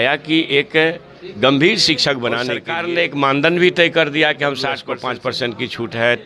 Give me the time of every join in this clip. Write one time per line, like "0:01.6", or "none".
0:02.7
0:04.9